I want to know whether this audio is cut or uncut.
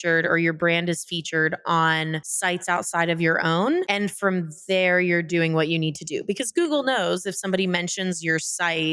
uncut